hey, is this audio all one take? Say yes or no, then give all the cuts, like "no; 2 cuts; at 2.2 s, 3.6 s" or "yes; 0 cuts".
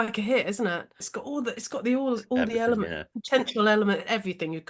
no; 1 cut; at 1.0 s